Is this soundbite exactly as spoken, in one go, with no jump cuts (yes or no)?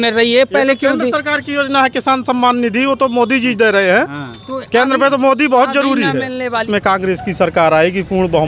no